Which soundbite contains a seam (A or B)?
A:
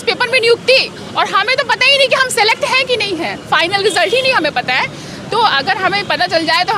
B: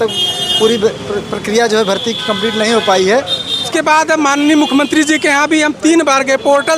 B